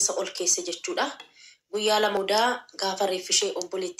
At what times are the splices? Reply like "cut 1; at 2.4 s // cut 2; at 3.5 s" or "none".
cut 1; at 2.2 s